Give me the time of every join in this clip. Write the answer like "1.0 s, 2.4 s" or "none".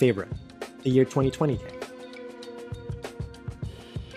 1.6 s